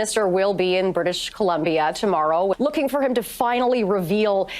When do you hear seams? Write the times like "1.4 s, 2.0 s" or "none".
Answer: 2.6 s